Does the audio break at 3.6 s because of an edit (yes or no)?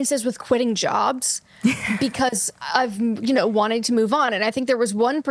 no